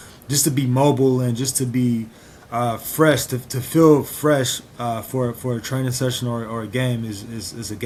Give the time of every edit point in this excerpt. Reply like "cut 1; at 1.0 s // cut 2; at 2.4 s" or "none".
none